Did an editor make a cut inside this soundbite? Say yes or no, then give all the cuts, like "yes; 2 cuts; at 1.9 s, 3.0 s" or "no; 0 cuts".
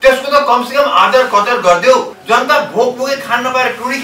yes; 1 cut; at 2.2 s